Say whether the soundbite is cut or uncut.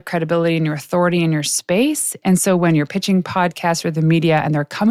uncut